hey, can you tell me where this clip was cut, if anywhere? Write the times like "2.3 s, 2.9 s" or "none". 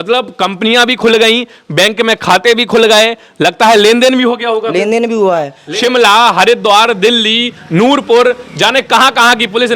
5.6 s